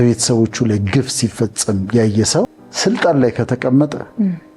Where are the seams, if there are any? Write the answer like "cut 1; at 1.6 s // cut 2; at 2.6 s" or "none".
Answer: cut 1; at 2.6 s